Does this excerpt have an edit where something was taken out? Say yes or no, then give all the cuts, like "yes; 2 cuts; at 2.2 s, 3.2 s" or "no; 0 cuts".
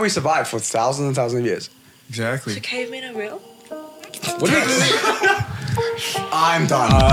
no; 0 cuts